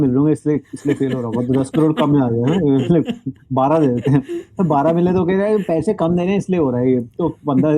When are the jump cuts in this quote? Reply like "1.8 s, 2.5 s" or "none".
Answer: none